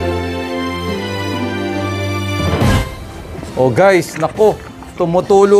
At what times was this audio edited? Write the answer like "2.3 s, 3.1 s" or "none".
2.9 s